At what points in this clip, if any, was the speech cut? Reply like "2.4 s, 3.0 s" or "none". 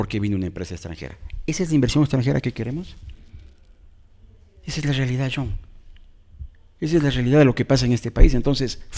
none